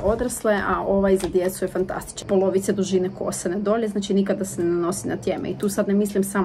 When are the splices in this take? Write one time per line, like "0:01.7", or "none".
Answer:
0:02.1